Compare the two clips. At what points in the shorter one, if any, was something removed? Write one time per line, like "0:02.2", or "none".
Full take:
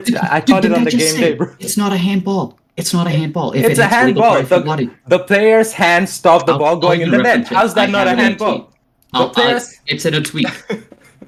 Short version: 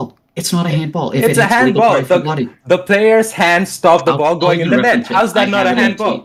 none